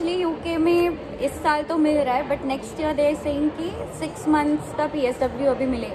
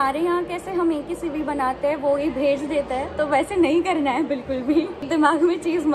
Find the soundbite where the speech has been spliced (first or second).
second